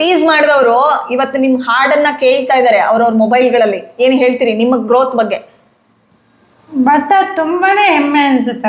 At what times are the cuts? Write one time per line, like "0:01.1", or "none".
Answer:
none

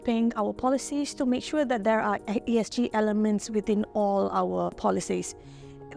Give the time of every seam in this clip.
0:04.8

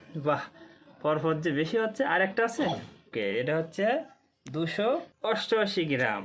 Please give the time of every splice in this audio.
0:03.1
0:05.1

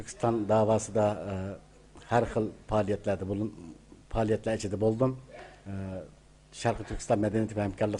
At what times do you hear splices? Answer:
0:01.3

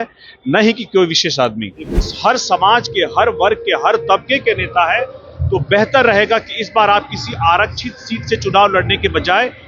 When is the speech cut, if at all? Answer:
0:01.9

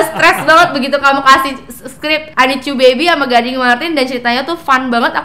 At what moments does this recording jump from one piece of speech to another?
0:02.2

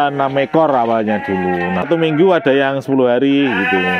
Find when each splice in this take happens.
0:01.9

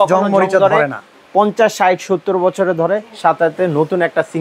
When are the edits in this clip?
0:01.1

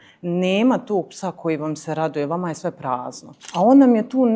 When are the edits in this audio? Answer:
0:03.4

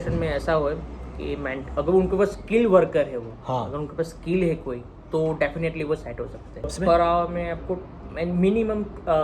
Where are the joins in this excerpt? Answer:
0:06.7

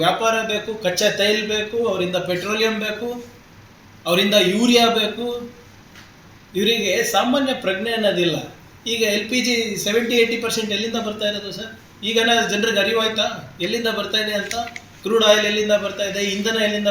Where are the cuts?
none

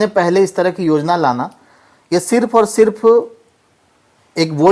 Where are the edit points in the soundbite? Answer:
none

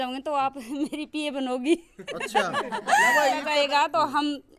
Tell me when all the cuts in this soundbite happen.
0:03.5

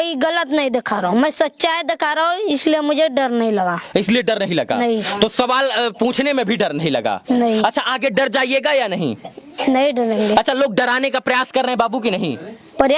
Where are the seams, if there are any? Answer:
none

